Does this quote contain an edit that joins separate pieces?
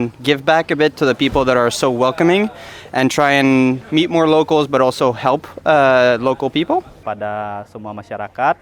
yes; 1 cut; at 7.0 s

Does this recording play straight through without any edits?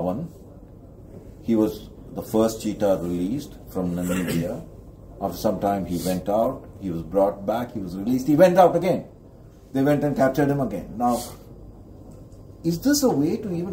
yes; 0 cuts

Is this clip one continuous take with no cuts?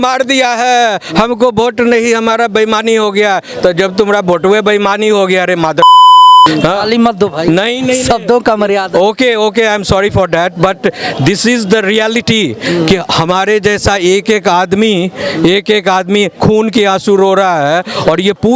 yes; 0 cuts

